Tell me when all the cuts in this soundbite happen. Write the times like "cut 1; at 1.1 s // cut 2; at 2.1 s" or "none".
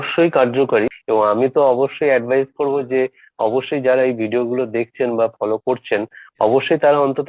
cut 1; at 1.0 s